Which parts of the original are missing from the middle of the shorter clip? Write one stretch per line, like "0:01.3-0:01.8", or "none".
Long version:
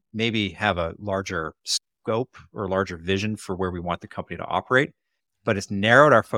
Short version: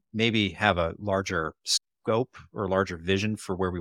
none